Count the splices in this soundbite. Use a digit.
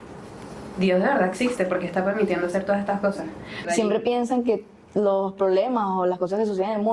1